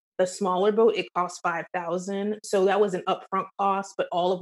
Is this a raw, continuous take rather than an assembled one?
yes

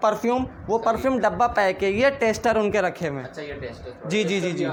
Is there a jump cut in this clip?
no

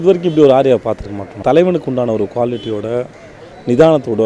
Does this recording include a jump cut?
yes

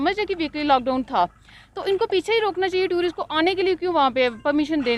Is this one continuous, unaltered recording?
yes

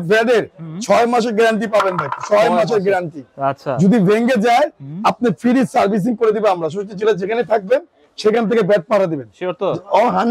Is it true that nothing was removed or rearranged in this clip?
yes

